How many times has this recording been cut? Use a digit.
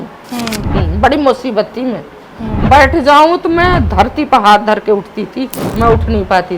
1